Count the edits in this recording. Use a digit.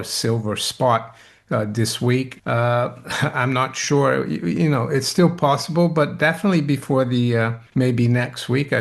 2